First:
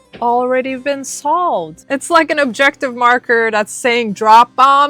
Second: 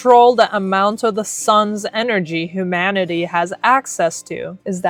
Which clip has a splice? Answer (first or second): first